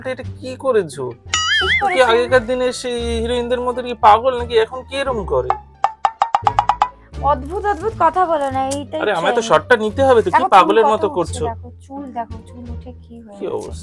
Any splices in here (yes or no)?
no